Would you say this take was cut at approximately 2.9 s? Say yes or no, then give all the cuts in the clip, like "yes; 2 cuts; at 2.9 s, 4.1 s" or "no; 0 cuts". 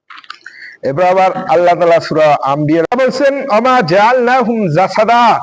yes; 1 cut; at 2.9 s